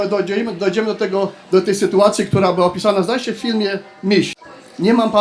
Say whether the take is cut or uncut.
cut